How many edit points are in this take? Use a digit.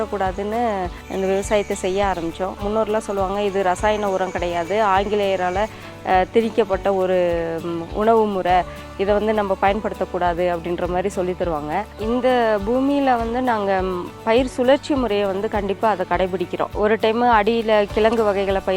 4